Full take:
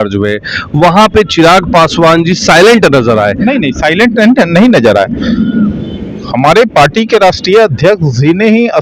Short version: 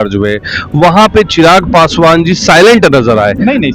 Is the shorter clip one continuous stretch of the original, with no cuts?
yes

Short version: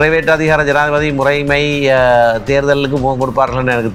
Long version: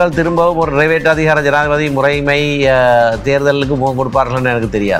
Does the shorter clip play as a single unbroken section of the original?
yes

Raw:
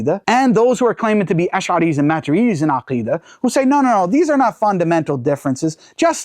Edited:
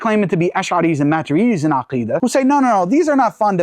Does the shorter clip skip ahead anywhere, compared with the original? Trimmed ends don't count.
yes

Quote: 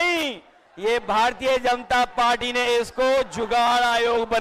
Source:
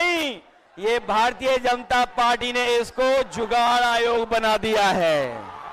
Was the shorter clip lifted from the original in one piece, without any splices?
yes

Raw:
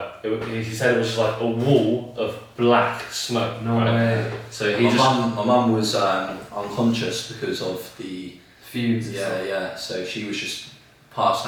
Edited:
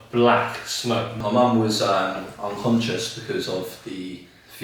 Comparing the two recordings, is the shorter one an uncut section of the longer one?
no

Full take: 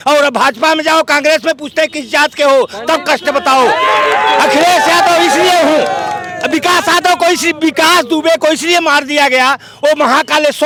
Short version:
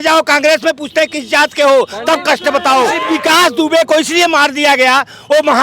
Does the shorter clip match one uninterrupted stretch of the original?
no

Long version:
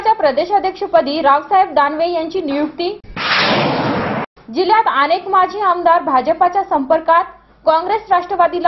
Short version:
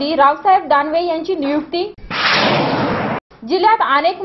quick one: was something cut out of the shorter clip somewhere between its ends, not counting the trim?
no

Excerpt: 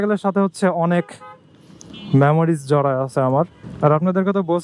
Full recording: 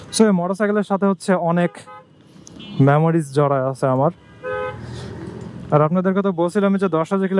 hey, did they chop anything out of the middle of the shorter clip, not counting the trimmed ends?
yes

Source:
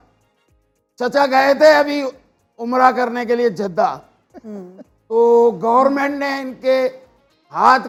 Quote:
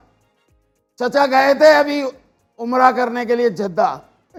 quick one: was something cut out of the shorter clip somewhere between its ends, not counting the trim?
no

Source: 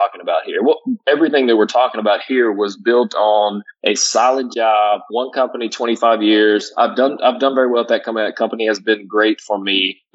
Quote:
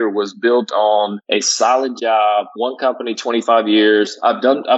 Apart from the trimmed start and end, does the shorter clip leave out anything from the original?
yes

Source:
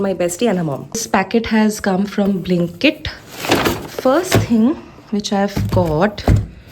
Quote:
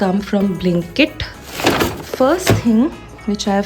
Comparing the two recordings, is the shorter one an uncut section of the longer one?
yes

